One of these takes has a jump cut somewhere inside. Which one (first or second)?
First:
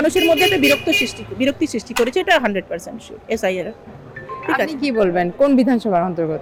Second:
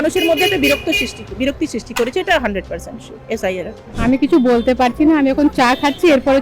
second